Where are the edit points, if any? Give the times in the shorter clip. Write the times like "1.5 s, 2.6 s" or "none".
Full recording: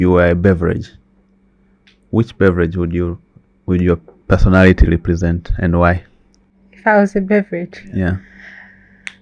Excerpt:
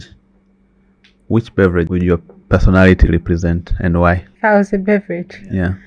1.9 s, 4.3 s